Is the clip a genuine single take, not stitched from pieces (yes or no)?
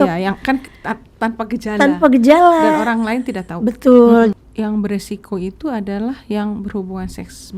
no